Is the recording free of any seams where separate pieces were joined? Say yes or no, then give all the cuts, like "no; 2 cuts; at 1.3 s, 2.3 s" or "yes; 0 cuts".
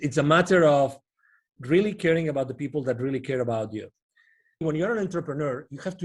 no; 1 cut; at 4.6 s